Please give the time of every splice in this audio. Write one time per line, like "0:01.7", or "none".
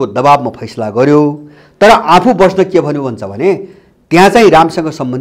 none